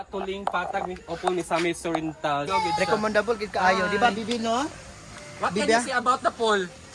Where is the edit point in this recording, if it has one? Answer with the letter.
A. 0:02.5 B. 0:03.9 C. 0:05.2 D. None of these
A